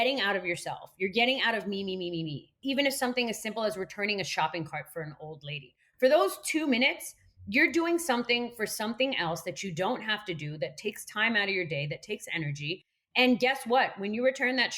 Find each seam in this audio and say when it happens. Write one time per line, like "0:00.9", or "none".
0:02.4